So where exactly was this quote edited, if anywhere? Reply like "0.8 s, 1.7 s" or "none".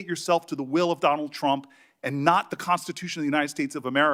none